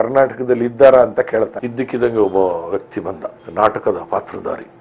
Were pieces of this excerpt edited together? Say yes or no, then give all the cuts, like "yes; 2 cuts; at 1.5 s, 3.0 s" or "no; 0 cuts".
yes; 1 cut; at 1.6 s